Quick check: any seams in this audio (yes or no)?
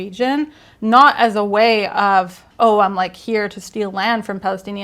yes